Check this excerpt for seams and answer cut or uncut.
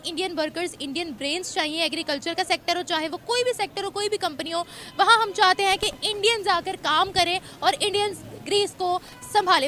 uncut